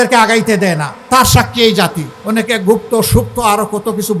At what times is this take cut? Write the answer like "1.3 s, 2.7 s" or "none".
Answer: 2.1 s